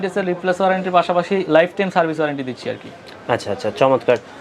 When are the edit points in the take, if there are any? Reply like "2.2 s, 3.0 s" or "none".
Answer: none